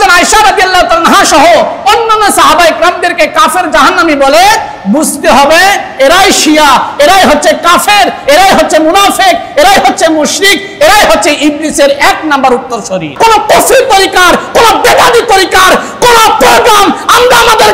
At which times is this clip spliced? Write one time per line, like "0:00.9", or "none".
0:13.1